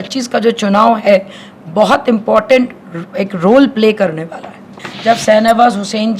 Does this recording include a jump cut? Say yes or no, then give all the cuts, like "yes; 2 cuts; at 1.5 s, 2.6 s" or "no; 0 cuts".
yes; 1 cut; at 4.9 s